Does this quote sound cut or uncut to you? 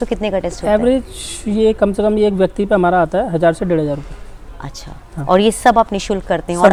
uncut